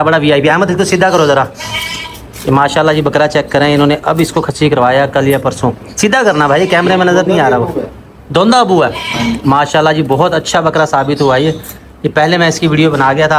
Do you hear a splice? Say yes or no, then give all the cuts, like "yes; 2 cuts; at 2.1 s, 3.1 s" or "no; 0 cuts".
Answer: no; 0 cuts